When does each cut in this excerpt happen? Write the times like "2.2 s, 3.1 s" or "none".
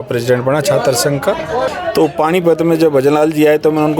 1.7 s